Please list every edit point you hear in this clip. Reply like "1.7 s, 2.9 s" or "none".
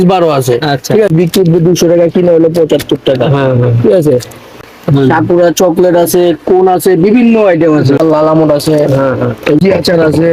1.1 s, 4.6 s, 8.0 s, 9.6 s